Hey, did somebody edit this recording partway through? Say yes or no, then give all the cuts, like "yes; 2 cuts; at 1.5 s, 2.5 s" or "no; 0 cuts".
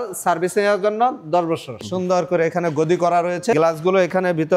yes; 2 cuts; at 1.9 s, 3.5 s